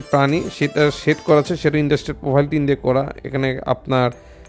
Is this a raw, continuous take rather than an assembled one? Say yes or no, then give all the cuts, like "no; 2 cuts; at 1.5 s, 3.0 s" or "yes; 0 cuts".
yes; 0 cuts